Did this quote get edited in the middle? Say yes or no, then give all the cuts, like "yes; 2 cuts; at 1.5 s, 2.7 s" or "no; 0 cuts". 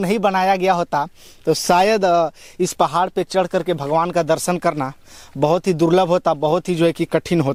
no; 0 cuts